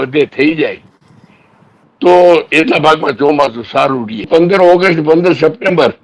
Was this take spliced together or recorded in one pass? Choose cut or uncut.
cut